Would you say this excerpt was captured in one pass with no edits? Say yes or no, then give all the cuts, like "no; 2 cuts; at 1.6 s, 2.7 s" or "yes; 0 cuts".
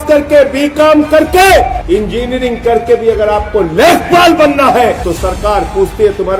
no; 2 cuts; at 1.8 s, 5.0 s